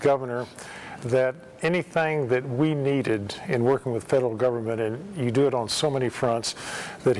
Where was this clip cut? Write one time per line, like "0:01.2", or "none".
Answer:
0:01.5